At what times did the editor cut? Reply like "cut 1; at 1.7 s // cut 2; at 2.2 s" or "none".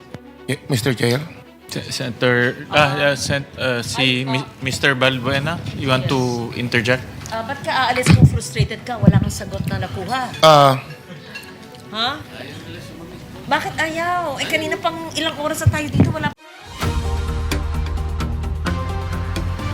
cut 1; at 16.4 s